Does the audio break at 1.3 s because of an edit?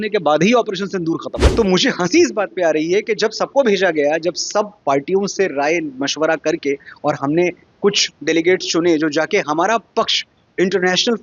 yes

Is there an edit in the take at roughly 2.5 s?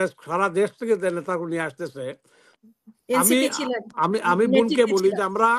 yes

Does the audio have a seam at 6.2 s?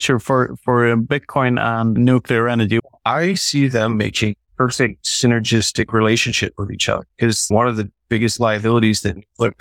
no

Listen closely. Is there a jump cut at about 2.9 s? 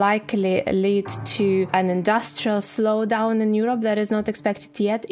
no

